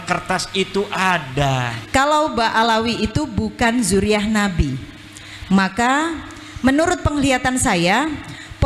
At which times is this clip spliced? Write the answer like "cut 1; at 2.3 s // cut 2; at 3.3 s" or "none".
cut 1; at 1.7 s